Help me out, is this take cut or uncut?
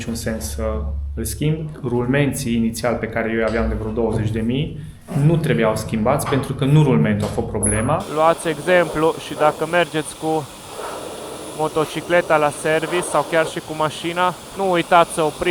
cut